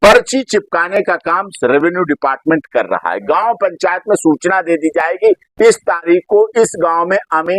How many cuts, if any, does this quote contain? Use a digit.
0